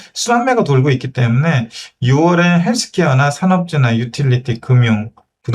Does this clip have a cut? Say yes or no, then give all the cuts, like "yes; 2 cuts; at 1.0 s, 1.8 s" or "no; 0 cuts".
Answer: no; 0 cuts